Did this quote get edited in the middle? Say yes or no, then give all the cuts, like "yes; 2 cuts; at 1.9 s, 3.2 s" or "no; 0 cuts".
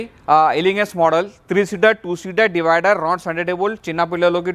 no; 0 cuts